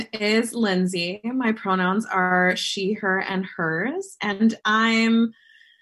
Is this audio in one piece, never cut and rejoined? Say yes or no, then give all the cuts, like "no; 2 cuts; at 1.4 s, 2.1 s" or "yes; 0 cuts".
yes; 0 cuts